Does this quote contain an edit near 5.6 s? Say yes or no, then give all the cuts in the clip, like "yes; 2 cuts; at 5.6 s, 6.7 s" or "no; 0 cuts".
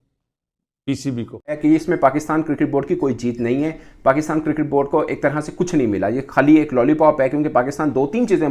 no; 1 cut; at 1.6 s